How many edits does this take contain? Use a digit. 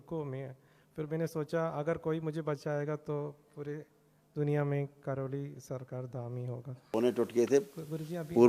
1